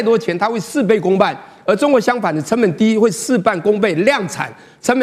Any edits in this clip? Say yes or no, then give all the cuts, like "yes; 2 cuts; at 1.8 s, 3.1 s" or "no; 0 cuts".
no; 0 cuts